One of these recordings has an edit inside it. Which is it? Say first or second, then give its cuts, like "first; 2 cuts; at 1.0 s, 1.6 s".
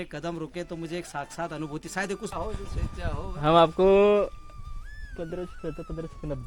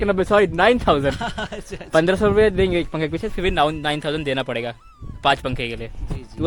first; 1 cut; at 2.3 s